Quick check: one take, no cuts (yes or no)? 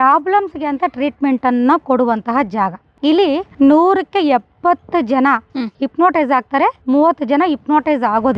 no